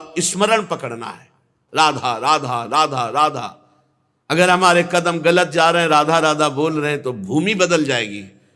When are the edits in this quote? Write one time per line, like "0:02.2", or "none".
none